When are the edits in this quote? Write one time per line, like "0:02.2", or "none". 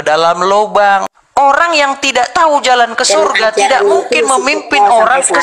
0:01.2